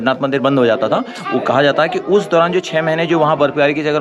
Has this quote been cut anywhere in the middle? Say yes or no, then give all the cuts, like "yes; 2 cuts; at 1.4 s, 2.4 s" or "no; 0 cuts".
no; 0 cuts